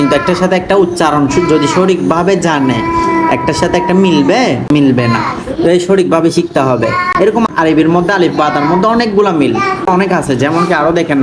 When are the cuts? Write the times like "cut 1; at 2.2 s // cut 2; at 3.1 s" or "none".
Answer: cut 1; at 4.7 s // cut 2; at 7.5 s // cut 3; at 9.9 s